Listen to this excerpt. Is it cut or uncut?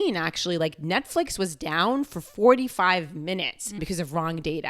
cut